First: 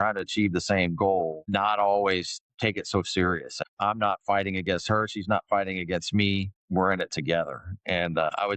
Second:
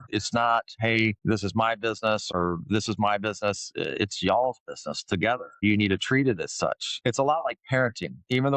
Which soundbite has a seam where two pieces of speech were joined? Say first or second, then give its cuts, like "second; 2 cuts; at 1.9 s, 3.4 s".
second; 1 cut; at 6.9 s